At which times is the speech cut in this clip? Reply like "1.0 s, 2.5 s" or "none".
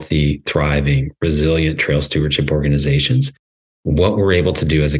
none